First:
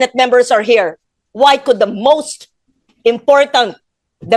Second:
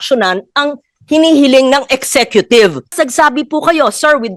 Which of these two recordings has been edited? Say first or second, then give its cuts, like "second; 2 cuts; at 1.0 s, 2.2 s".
second; 1 cut; at 2.9 s